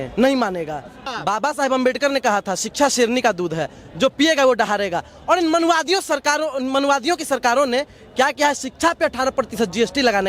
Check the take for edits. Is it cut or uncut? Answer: cut